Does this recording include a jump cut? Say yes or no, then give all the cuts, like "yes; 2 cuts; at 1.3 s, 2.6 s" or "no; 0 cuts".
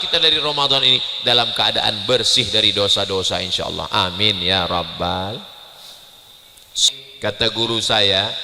yes; 1 cut; at 6.9 s